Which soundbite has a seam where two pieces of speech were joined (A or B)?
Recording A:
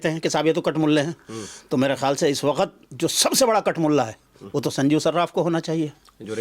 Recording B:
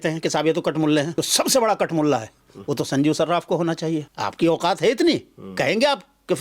B